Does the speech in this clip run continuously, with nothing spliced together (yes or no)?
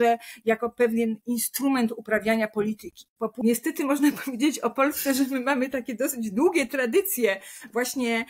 no